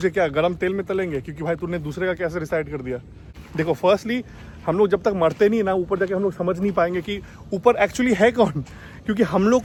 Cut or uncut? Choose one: uncut